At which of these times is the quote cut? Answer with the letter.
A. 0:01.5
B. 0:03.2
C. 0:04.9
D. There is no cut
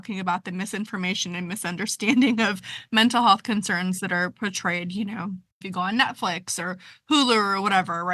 D